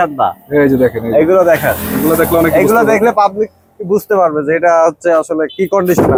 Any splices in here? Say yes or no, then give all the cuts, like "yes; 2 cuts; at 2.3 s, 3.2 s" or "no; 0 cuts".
no; 0 cuts